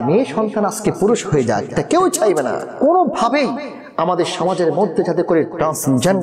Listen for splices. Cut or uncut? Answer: cut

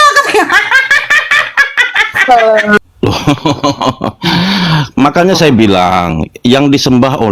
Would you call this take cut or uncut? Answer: cut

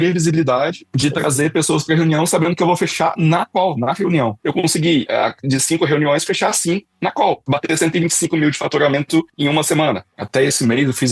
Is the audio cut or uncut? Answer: cut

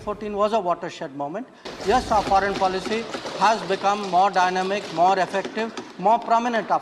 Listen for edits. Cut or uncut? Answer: cut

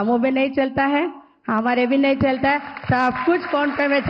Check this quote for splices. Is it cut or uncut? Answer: uncut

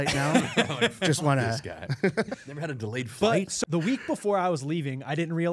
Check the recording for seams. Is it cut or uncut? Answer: cut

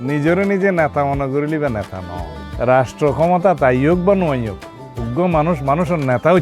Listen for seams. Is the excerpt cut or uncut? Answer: uncut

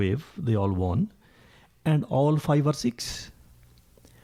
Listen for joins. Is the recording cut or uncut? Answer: uncut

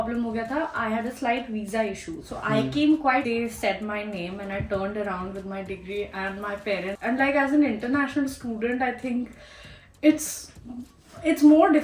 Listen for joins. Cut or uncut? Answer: cut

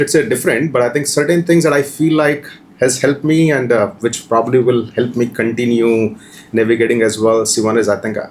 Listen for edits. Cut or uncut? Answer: uncut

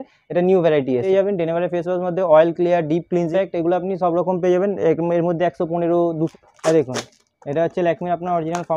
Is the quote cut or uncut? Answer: cut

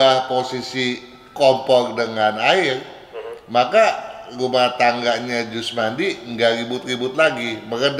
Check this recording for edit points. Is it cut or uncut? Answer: uncut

